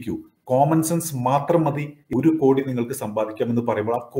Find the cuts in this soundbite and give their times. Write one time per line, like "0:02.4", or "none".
0:02.0